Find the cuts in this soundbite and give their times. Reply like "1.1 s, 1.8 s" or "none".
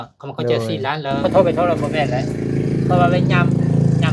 1.1 s